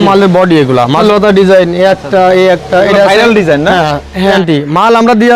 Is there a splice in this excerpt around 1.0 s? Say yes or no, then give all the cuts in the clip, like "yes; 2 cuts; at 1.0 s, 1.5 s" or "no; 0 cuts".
yes; 2 cuts; at 1.0 s, 4.4 s